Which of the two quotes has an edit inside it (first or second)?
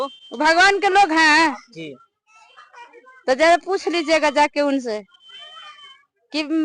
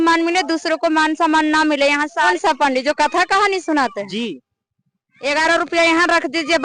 second